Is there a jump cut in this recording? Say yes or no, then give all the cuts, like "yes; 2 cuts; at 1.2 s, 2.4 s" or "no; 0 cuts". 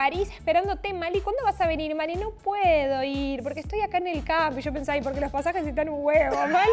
no; 0 cuts